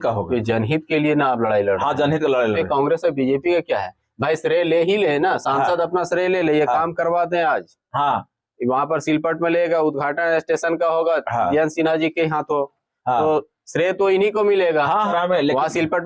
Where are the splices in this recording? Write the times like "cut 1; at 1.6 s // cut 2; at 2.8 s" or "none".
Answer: cut 1; at 15.1 s